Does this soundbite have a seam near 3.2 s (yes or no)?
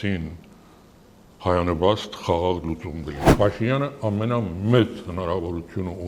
yes